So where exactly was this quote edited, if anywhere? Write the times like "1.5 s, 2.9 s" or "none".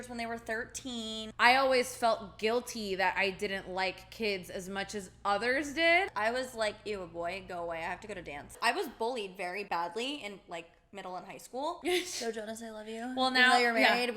1.2 s, 6.1 s, 8.5 s, 9.7 s, 11.8 s